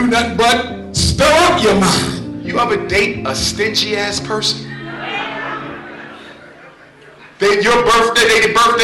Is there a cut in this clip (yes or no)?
yes